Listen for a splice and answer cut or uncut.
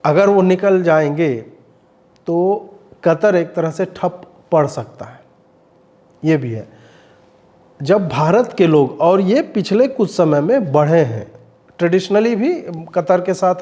uncut